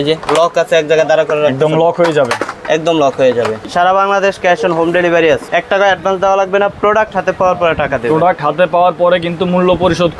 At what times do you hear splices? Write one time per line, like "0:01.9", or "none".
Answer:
0:03.7
0:05.4